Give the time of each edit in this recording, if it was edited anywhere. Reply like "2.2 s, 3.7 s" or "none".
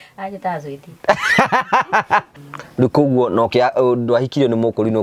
2.4 s